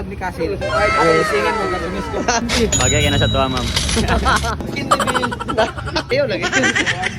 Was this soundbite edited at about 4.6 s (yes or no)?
yes